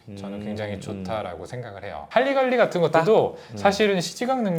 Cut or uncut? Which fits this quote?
cut